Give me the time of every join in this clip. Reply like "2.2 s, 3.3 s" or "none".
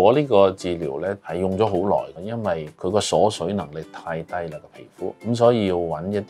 1.2 s, 2.7 s, 5.2 s